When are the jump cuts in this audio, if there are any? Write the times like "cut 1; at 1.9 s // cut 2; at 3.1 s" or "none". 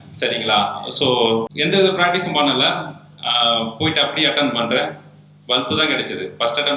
cut 1; at 1.5 s